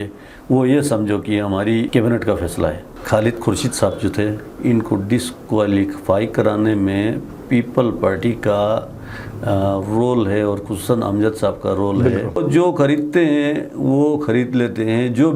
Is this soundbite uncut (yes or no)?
no